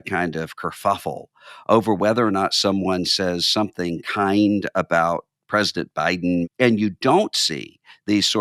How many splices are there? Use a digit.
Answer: 1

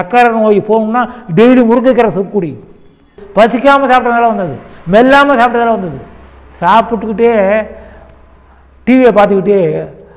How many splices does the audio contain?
1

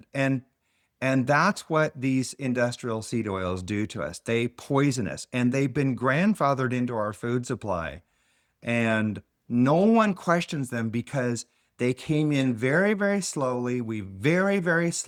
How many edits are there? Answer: 0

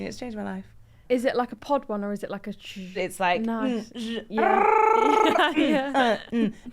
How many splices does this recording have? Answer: 2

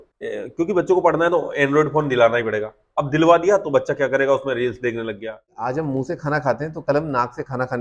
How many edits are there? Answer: 1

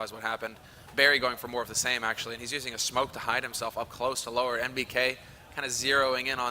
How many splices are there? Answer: 1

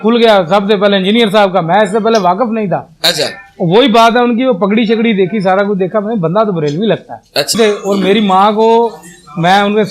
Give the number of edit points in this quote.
1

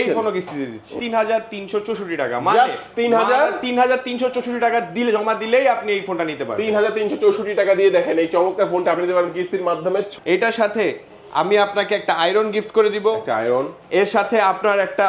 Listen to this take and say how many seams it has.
2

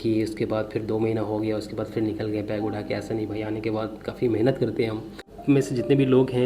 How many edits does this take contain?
1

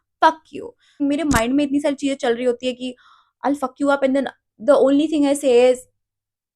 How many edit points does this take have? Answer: 1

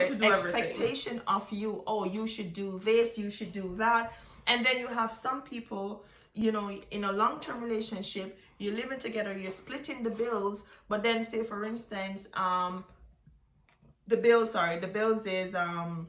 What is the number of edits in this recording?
0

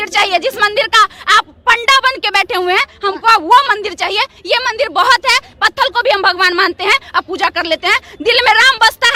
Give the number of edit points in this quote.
0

